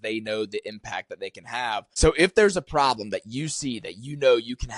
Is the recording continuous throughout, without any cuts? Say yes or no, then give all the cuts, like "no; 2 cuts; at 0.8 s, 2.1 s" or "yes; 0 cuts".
no; 1 cut; at 1.9 s